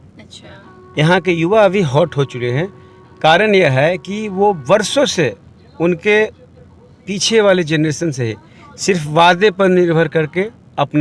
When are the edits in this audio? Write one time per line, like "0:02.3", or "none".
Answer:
none

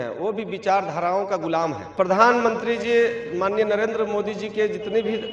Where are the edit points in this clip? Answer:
0:01.8

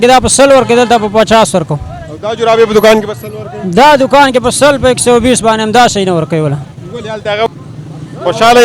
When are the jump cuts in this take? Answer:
0:07.5

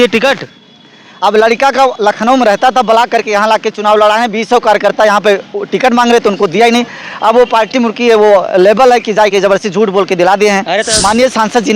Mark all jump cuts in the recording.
0:10.8

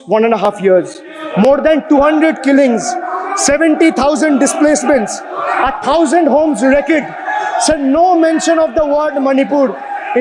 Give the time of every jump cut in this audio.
none

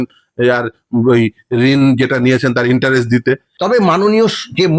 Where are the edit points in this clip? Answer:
0:03.5

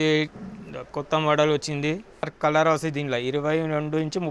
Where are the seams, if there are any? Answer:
0:02.3

